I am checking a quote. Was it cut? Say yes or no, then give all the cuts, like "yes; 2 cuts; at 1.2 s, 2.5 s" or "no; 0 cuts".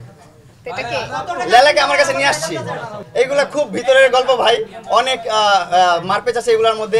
no; 0 cuts